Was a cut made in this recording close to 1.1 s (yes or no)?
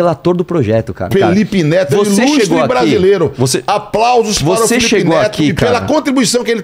yes